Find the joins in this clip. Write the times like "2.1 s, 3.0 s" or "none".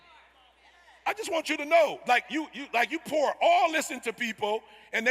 none